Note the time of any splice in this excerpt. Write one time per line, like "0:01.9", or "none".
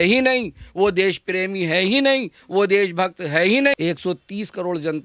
0:03.8